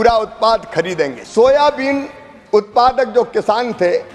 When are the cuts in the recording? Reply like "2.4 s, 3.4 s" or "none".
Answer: 1.2 s